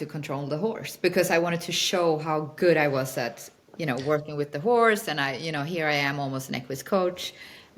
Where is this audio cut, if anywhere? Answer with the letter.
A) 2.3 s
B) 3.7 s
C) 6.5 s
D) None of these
D